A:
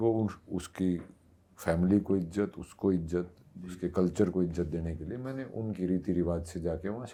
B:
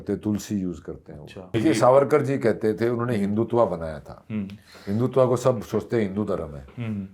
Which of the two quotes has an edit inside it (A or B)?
B